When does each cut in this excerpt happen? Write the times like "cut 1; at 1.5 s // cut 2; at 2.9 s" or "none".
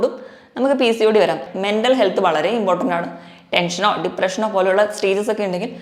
cut 1; at 1.5 s